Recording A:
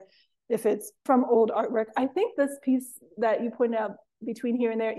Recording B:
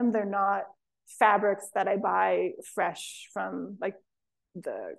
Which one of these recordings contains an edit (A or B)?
A